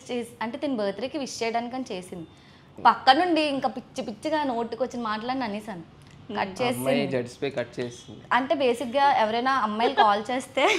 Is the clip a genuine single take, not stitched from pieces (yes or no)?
no